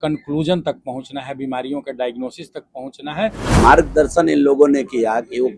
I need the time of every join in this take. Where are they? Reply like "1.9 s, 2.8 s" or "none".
3.4 s